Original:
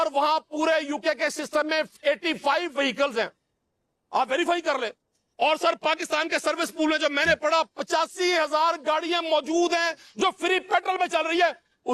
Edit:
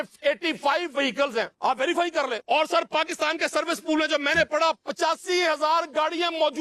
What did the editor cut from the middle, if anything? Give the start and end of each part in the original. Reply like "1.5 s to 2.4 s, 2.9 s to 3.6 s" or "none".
3.3 s to 4.0 s, 4.9 s to 5.3 s